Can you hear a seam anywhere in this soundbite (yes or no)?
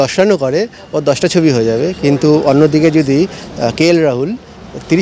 no